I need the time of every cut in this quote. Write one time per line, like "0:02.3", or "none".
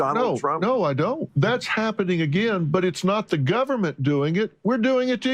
0:01.2